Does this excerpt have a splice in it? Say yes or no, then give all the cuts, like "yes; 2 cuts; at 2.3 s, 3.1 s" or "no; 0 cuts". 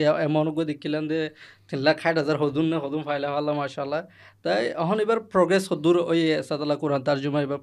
no; 0 cuts